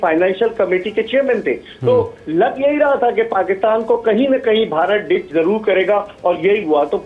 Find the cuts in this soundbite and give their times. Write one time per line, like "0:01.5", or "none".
none